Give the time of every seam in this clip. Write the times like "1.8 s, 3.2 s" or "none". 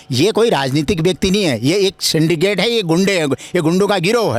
none